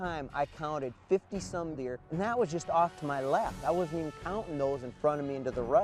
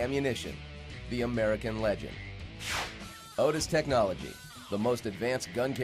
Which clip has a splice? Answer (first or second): first